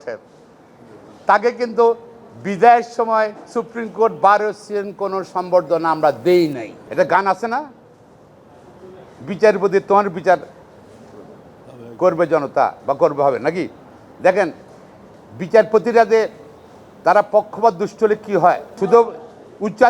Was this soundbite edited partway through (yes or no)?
yes